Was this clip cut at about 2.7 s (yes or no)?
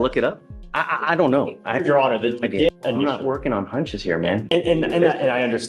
yes